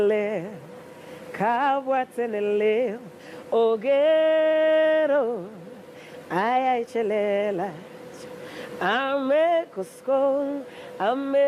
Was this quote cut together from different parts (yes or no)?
no